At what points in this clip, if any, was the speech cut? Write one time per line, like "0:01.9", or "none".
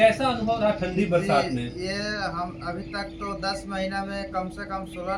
none